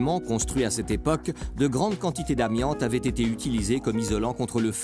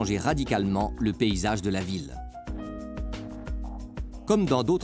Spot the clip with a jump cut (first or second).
second